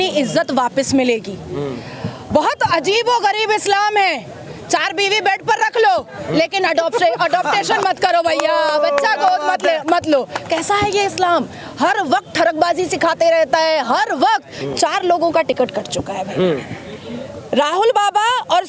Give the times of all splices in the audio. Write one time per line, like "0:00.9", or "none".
0:14.5

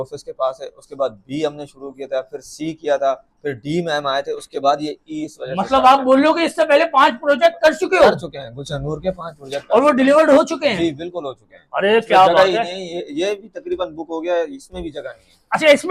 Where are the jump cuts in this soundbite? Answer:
none

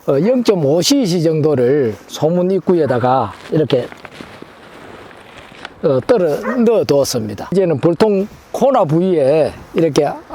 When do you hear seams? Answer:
0:07.4

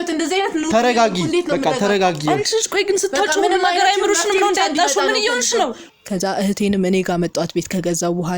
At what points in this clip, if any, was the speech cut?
0:05.8

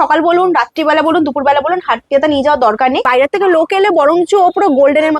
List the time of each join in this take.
0:03.1

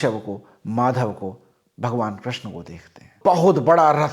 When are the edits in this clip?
0:03.1

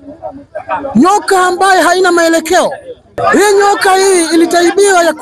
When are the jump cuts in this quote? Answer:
0:03.2

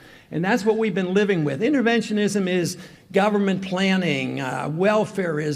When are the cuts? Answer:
0:02.3

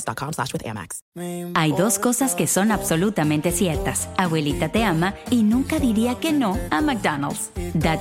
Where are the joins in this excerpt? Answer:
0:01.0

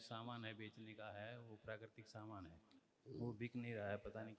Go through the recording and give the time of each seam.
none

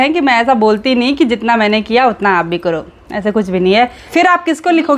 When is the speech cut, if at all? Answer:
0:04.0

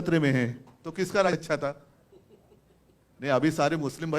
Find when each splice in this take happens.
0:01.3

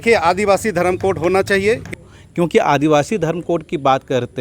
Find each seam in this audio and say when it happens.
0:01.9

